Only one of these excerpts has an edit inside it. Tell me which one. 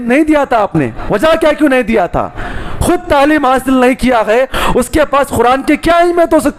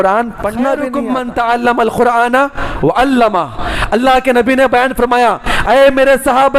second; 1 cut; at 1.0 s

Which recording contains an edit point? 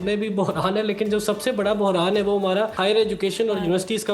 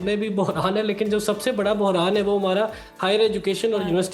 first; 1 cut; at 2.7 s

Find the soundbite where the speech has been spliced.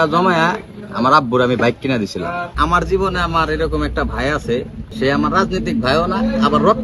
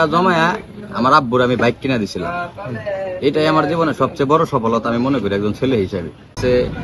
first; 2 cuts; at 2.5 s, 4.9 s

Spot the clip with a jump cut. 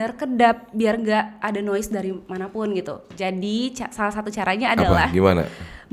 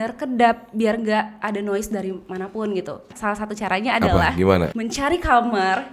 second; 2 cuts; at 3.1 s, 4.8 s

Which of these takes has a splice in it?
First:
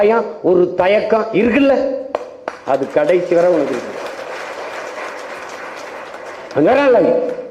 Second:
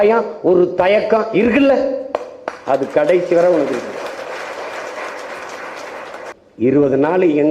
second; 1 cut; at 6.3 s

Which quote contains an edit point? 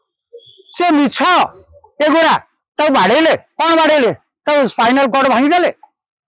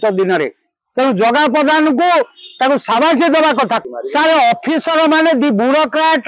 second; 1 cut; at 3.8 s

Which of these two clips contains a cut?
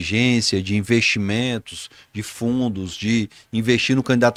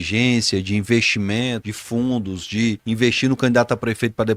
second; 2 cuts; at 1.7 s, 2.8 s

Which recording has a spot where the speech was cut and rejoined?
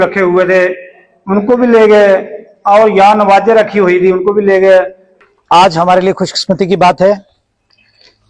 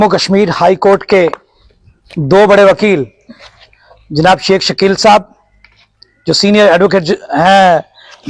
first; 1 cut; at 5.2 s

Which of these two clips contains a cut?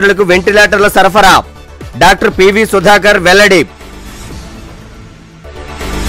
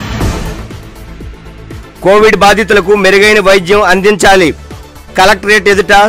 second; 1 cut; at 1.9 s

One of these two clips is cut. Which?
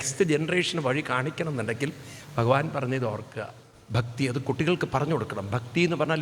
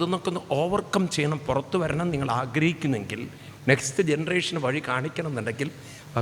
first; 1 cut; at 3.5 s

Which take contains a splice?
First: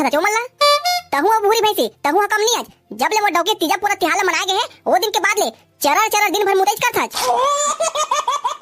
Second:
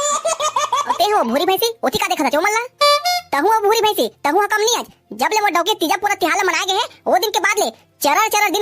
second; 1 cut; at 1.0 s

